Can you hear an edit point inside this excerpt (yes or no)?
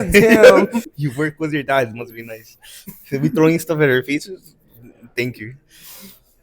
yes